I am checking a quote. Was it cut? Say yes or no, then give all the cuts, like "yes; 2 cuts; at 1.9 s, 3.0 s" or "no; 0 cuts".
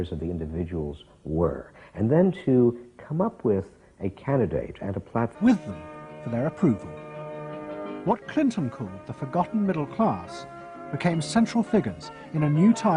no; 0 cuts